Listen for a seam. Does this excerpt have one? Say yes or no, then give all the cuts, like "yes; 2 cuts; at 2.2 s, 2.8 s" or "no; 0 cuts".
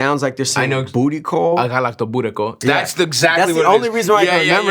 yes; 1 cut; at 2.6 s